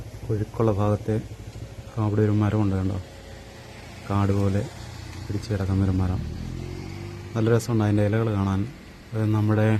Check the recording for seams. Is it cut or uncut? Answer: uncut